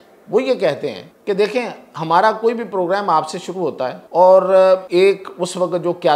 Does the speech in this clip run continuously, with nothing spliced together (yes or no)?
no